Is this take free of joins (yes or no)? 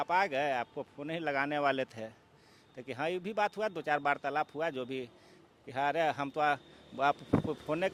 yes